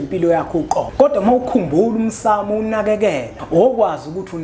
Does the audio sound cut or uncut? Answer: cut